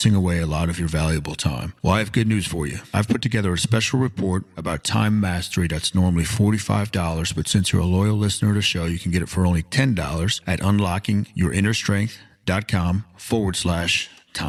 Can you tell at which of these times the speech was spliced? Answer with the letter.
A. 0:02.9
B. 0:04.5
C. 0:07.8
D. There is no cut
D